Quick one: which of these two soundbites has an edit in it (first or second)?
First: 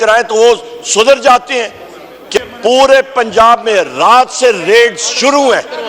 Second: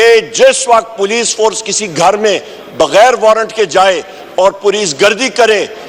first